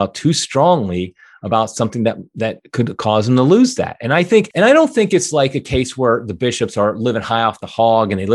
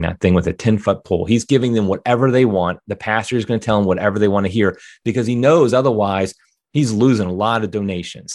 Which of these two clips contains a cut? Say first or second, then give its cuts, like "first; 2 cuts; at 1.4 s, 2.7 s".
first; 1 cut; at 4.5 s